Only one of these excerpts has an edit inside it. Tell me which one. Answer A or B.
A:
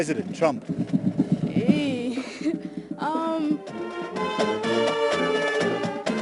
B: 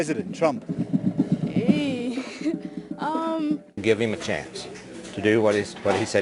B